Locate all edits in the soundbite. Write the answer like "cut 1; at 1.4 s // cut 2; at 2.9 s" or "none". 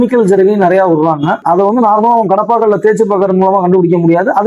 cut 1; at 1.4 s